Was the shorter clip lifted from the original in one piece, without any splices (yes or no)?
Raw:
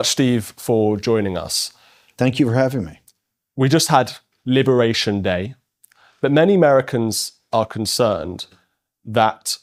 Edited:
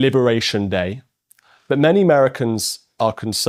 yes